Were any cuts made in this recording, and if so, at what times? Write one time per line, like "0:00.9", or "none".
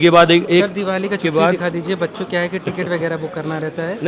none